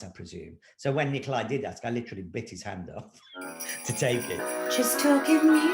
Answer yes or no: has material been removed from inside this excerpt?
yes